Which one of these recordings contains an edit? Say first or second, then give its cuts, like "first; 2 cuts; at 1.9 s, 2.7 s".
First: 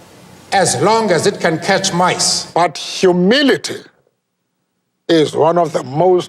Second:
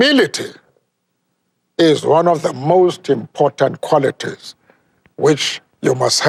first; 1 cut; at 2.3 s